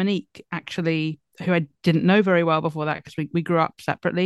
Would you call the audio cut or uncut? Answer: uncut